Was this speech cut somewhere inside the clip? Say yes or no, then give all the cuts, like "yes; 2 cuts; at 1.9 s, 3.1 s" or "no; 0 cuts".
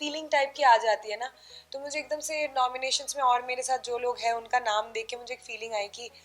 no; 0 cuts